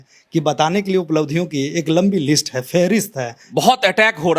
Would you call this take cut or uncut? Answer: cut